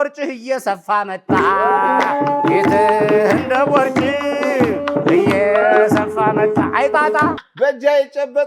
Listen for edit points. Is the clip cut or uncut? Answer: cut